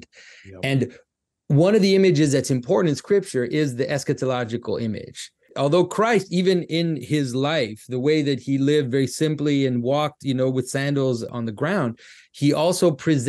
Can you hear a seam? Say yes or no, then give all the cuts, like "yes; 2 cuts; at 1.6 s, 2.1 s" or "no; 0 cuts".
yes; 2 cuts; at 5.5 s, 11.3 s